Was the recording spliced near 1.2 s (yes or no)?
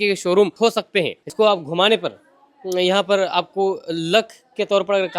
yes